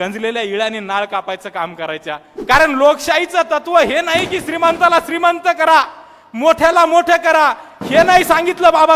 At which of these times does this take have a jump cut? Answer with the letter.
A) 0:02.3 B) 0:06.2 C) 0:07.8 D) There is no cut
A